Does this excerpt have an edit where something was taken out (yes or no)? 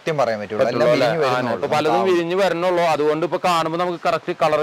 no